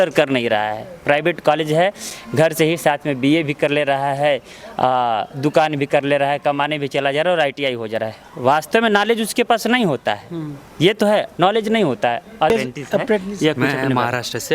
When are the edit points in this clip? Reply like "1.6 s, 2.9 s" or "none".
12.5 s